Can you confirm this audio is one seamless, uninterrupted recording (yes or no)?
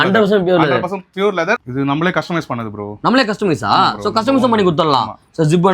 no